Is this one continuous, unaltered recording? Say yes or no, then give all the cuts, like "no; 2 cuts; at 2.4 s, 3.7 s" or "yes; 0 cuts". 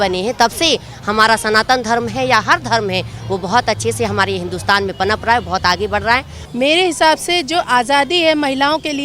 no; 1 cut; at 6.4 s